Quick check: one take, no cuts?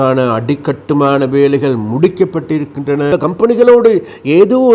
no; 1 cut; at 3.1 s

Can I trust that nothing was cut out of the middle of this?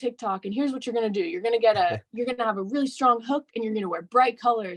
yes; 0 cuts

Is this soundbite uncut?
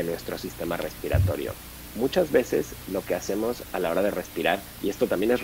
yes; 0 cuts

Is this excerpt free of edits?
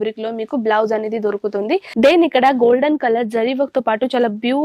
no; 1 cut; at 1.9 s

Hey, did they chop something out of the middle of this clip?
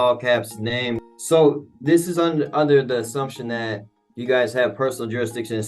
yes; 1 cut; at 1.0 s

